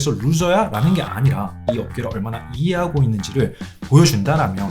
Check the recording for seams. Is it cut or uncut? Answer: cut